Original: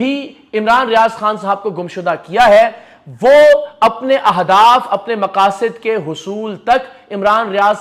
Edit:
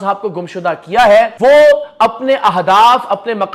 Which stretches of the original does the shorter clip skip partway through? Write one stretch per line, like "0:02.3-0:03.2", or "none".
0:02.7-0:03.1